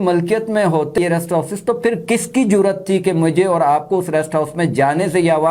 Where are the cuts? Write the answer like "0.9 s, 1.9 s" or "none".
1.0 s